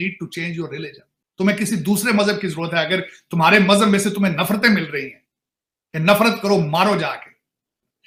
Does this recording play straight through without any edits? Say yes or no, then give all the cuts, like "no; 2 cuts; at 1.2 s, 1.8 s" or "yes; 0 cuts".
yes; 0 cuts